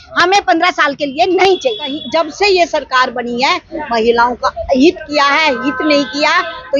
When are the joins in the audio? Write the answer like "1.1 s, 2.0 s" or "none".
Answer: 2.0 s